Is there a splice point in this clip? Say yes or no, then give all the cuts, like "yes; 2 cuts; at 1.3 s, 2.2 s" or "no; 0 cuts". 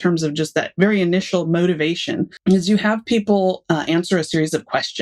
yes; 1 cut; at 2.3 s